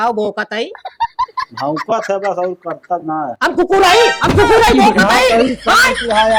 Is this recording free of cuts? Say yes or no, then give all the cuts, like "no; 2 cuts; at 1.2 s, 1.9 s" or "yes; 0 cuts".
yes; 0 cuts